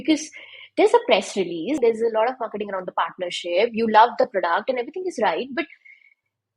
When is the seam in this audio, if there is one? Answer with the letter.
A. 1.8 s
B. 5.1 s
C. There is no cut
A